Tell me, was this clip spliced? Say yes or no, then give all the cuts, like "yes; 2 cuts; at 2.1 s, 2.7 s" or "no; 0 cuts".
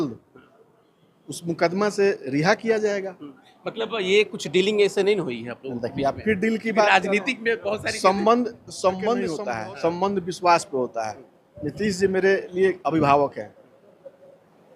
yes; 1 cut; at 9.4 s